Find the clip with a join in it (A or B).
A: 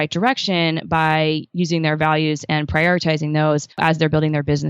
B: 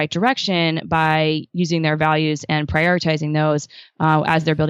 A